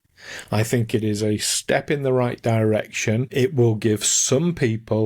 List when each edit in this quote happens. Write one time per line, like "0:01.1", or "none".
0:03.3